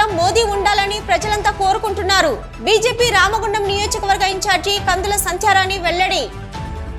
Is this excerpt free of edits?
yes; 0 cuts

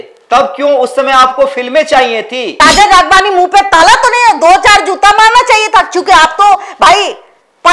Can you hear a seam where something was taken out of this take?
yes; 1 cut; at 2.4 s

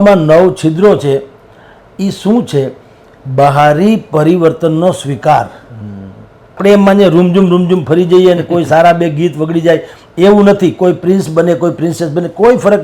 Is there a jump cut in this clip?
yes; 1 cut; at 6.6 s

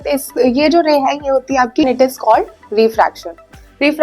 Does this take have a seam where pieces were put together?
yes; 1 cut; at 1.9 s

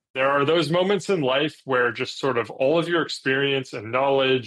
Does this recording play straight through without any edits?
yes; 0 cuts

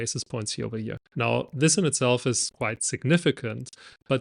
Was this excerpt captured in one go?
no; 2 cuts; at 1.0 s, 2.5 s

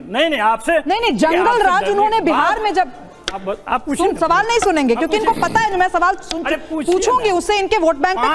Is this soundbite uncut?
yes; 0 cuts

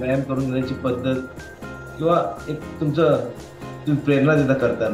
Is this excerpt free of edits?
yes; 0 cuts

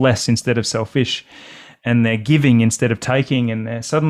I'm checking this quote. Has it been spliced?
no; 0 cuts

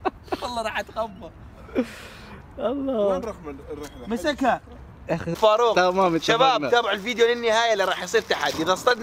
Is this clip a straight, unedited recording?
no; 1 cut; at 5.3 s

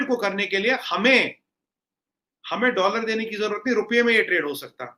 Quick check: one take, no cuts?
yes; 0 cuts

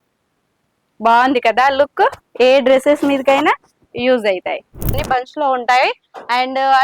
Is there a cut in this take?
yes; 1 cut; at 5.0 s

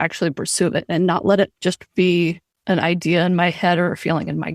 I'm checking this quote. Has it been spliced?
yes; 1 cut; at 2.5 s

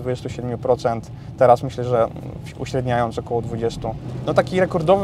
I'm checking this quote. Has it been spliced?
yes; 1 cut; at 4.1 s

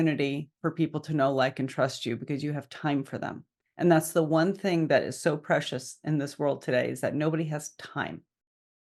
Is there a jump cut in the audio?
no; 0 cuts

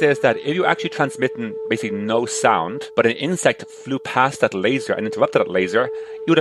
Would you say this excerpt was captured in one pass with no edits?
yes; 0 cuts

